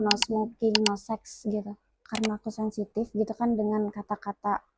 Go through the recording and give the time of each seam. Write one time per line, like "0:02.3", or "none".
0:02.0